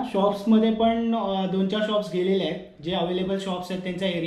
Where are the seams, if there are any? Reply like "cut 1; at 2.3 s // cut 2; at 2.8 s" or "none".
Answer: none